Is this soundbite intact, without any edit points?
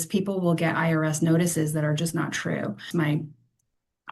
no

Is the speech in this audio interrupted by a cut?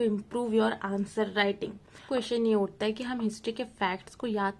yes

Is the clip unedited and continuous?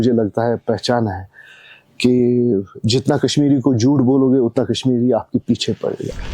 yes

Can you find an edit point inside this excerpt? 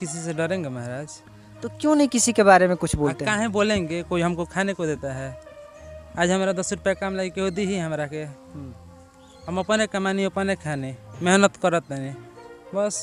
no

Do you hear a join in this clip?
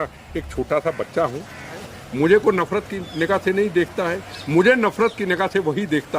yes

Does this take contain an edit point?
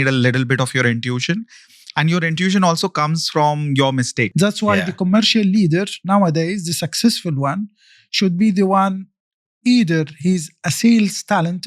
yes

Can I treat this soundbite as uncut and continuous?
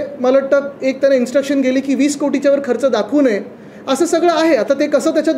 yes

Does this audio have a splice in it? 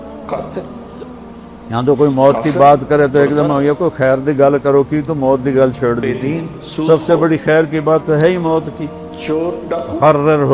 yes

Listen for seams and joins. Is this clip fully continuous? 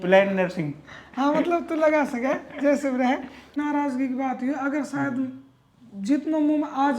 no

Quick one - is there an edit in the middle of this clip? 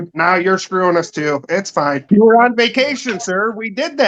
yes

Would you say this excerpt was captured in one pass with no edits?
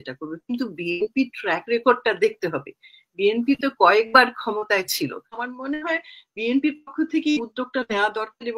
no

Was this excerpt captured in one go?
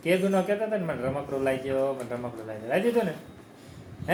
yes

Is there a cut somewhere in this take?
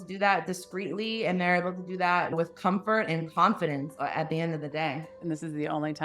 yes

